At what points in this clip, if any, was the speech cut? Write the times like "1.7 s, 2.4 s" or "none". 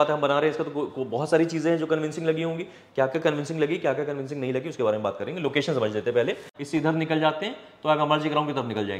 6.5 s